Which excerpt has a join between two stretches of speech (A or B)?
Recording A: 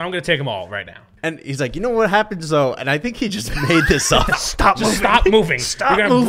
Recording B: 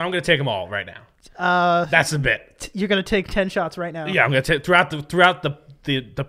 A